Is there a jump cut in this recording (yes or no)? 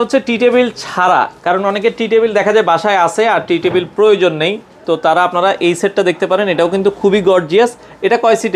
no